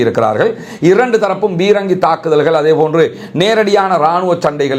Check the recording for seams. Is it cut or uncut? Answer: uncut